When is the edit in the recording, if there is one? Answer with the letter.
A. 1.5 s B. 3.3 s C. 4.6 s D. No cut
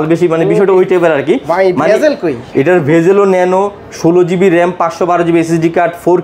D